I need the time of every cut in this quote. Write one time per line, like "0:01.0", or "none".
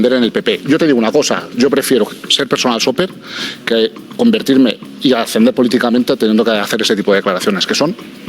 none